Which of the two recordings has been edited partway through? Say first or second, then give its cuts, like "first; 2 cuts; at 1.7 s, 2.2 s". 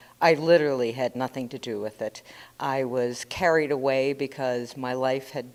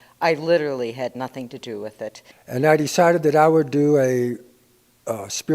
second; 1 cut; at 2.3 s